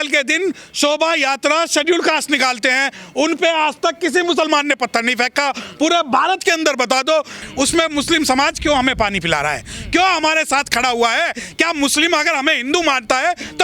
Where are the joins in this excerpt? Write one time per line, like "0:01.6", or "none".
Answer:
0:07.4